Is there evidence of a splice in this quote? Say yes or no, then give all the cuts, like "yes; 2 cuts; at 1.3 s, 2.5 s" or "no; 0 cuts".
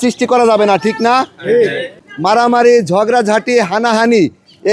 yes; 1 cut; at 2.0 s